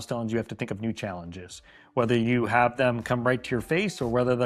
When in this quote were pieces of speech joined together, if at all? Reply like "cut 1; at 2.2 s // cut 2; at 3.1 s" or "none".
none